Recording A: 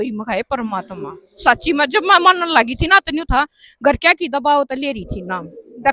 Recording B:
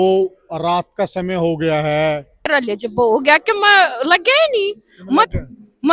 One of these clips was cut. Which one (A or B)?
B